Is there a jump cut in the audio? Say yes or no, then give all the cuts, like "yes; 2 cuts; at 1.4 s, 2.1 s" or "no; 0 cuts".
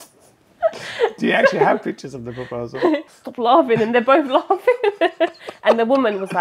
yes; 1 cut; at 3.1 s